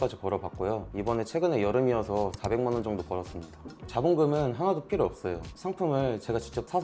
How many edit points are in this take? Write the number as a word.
one